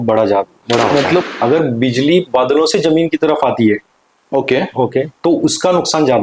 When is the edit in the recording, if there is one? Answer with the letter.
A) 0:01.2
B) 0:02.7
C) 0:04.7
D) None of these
A